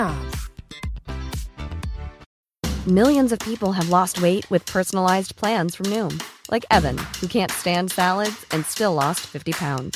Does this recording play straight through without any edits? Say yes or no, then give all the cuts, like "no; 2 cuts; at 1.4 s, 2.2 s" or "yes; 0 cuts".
no; 1 cut; at 2.2 s